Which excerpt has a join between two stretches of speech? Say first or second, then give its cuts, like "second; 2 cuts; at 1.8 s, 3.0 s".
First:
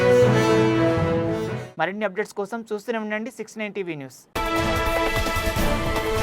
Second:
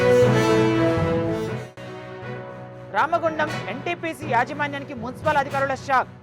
second; 1 cut; at 1.7 s